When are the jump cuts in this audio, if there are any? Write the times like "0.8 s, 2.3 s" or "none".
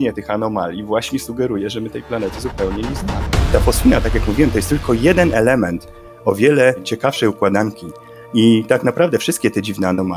3.5 s